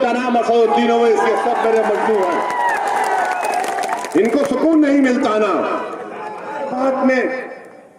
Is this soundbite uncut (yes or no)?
no